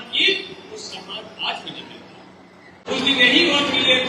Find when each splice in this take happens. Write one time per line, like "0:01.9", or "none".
0:02.8